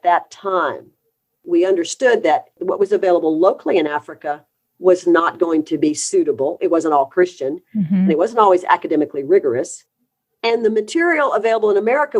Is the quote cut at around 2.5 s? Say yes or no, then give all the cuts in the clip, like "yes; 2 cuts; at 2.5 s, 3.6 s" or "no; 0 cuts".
yes; 2 cuts; at 1.4 s, 2.5 s